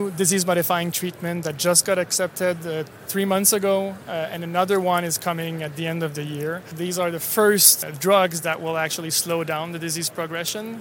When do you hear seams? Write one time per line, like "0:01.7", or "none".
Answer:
0:06.7
0:07.8